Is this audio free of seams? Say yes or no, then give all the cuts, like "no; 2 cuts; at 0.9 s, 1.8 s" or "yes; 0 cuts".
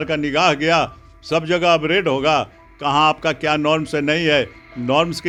yes; 0 cuts